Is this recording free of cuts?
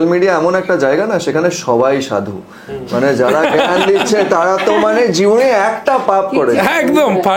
yes; 0 cuts

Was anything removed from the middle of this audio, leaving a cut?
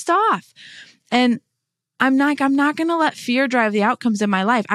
no; 0 cuts

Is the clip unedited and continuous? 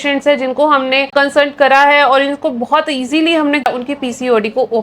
no; 2 cuts; at 1.1 s, 3.7 s

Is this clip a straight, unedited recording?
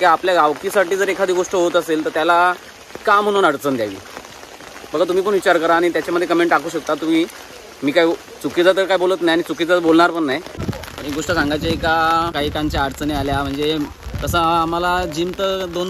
yes; 0 cuts

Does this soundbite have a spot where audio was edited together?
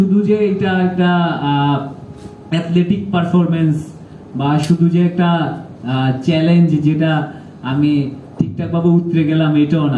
no; 0 cuts

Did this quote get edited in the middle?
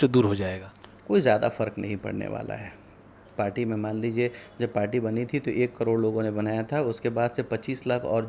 no; 0 cuts

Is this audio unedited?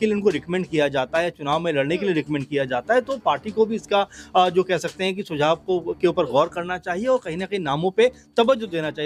yes; 0 cuts

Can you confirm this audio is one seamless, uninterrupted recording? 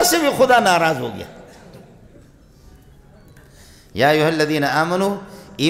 yes; 0 cuts

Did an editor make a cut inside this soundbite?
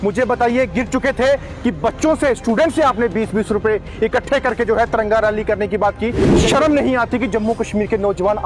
yes; 1 cut; at 6.3 s

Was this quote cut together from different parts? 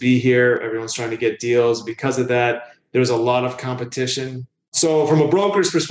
yes; 1 cut; at 4.7 s

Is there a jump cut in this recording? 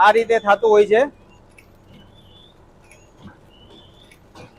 no; 0 cuts

